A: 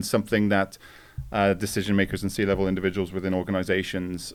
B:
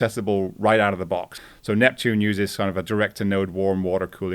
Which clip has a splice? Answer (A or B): B